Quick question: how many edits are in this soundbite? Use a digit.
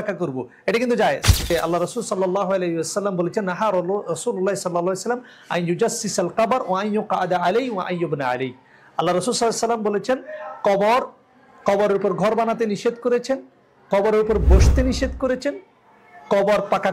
1